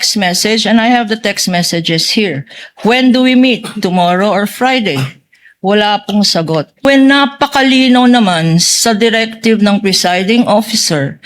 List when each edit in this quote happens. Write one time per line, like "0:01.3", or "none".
0:06.9

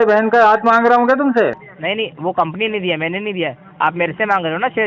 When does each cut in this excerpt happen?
0:01.7

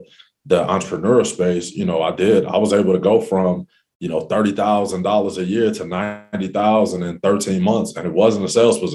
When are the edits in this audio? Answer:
none

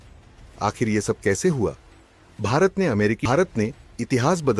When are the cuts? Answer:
0:03.2

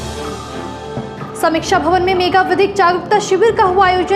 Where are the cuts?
none

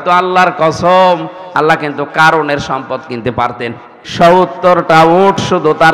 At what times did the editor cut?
0:04.0

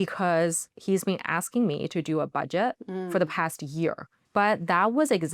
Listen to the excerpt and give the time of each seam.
0:04.1

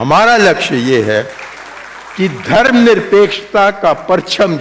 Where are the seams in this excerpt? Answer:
none

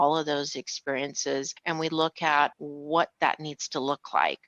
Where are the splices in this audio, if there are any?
0:01.5
0:02.7

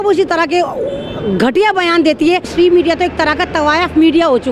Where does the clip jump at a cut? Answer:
0:02.5

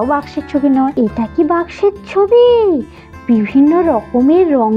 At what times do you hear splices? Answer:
0:00.9

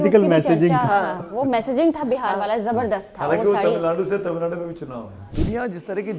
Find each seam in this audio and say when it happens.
0:05.2

